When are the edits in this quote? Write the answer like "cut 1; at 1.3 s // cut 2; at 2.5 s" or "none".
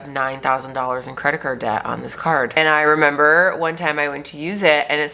cut 1; at 2.5 s